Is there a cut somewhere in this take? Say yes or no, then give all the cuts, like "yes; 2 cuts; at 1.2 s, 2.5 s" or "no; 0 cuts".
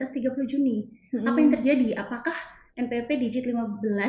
no; 0 cuts